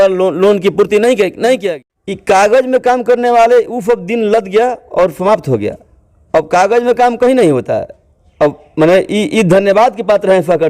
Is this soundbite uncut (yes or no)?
no